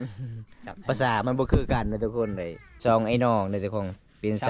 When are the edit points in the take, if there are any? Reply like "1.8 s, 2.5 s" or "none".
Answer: 2.7 s